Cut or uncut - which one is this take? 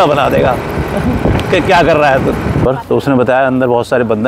cut